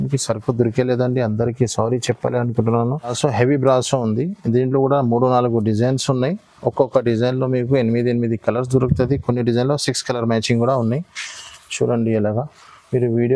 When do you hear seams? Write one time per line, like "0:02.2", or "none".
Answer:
0:03.1